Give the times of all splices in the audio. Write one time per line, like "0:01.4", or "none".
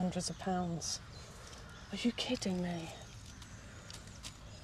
none

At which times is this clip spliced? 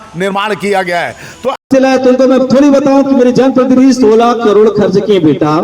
0:01.7

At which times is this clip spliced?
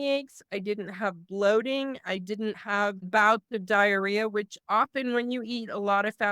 0:02.7

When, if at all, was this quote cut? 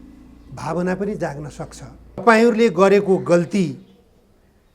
0:02.2

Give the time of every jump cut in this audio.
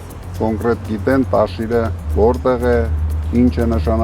0:02.0

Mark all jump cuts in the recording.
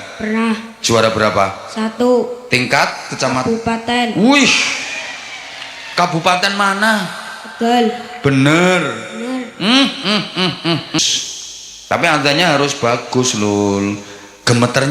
0:11.0

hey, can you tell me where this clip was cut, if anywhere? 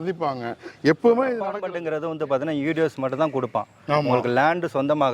0:01.6

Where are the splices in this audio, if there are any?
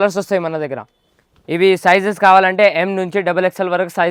none

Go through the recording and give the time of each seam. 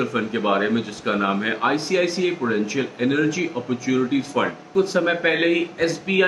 0:04.7

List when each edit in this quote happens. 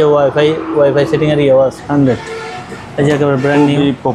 0:01.8

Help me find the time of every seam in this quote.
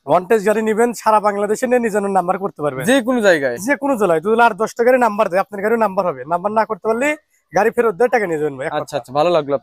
none

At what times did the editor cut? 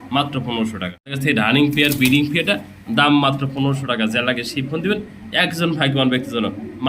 0:01.2

